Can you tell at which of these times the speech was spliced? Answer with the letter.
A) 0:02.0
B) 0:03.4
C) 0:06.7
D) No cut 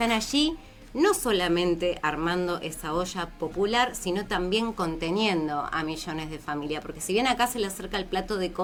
D